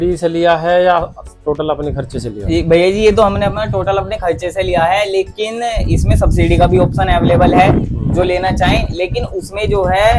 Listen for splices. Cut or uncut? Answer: uncut